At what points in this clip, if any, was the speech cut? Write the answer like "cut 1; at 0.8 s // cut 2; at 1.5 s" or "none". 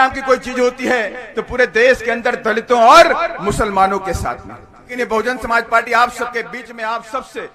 cut 1; at 4.9 s